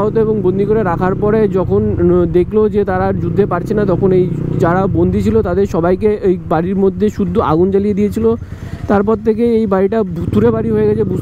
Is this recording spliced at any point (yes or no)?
no